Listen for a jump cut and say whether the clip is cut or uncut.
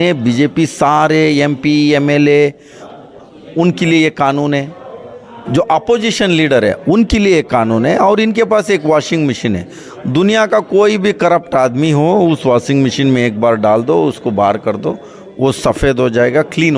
uncut